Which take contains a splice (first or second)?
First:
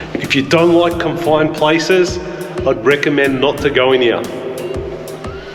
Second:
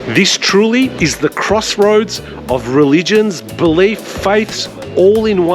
second